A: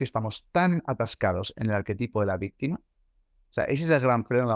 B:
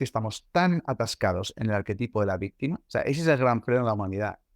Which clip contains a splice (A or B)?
B